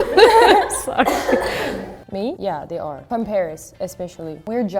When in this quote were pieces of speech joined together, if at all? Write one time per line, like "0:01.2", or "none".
none

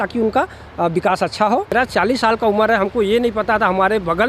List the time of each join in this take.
0:01.7

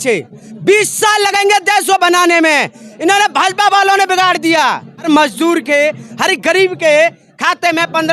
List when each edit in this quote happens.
0:05.1

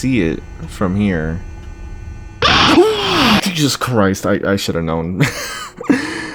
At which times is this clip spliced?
none

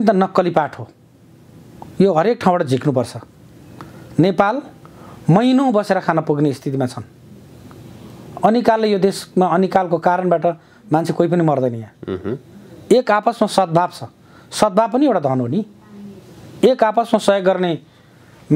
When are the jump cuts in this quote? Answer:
none

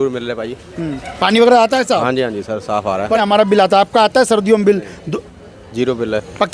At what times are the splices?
0:03.2

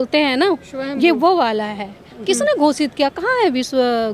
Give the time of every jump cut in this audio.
none

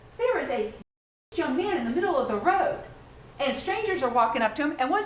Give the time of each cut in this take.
none

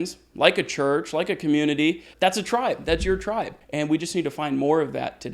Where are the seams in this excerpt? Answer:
0:02.1
0:03.6

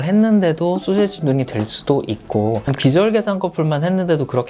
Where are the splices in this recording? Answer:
none

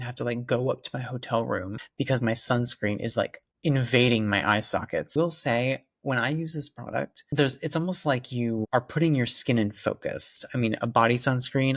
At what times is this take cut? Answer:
0:01.8
0:05.1
0:07.2
0:10.4

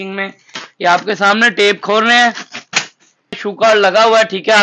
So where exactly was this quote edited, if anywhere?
0:03.4

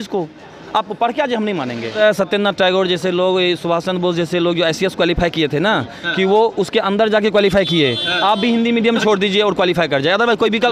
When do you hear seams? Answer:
none

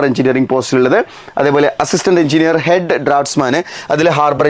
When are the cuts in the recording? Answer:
none

